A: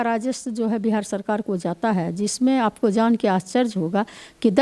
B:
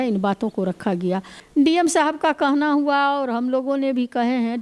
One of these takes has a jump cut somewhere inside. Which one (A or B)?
B